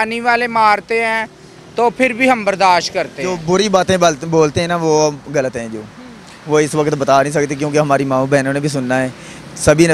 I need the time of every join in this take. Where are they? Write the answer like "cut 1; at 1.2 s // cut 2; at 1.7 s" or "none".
cut 1; at 3.3 s